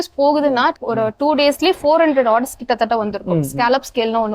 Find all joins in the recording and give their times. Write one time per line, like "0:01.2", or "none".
none

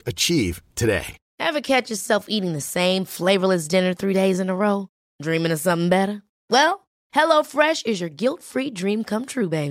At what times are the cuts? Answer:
0:01.2

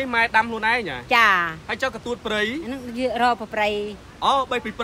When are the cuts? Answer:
none

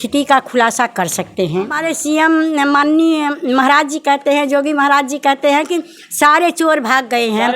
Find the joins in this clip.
0:01.9

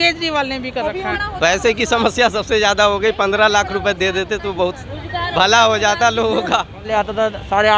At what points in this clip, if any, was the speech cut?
0:01.2
0:06.9

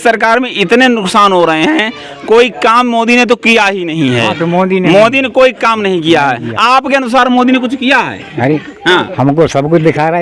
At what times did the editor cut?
none

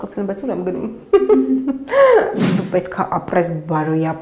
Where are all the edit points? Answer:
0:02.4

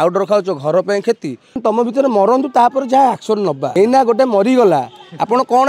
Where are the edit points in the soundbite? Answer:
0:01.6
0:03.7

